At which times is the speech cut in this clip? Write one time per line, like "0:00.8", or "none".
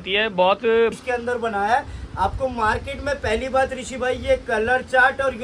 0:01.0